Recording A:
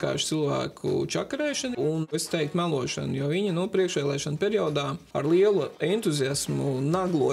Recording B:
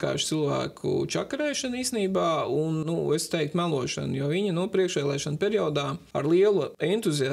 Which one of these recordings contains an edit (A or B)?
A